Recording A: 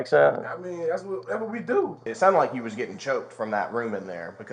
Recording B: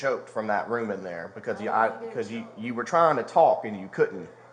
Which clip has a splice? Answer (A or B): A